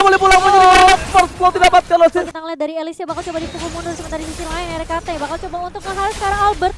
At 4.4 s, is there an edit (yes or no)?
no